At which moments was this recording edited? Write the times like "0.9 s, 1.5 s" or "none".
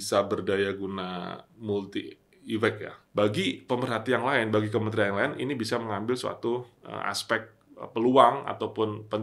2.9 s